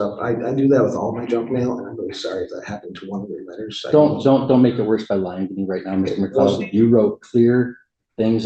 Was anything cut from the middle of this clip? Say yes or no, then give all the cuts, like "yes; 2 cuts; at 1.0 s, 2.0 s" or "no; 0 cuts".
no; 0 cuts